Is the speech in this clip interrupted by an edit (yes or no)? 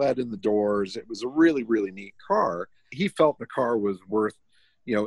yes